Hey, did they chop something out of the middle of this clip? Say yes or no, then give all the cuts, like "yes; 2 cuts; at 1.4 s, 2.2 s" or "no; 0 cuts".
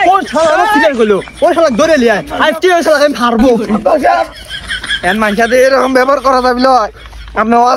no; 0 cuts